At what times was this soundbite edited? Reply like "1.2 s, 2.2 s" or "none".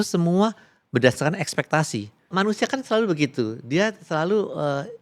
2.3 s